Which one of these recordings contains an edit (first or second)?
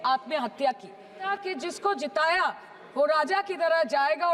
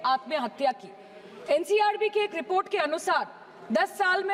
first